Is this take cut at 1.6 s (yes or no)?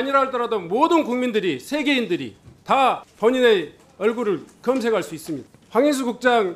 no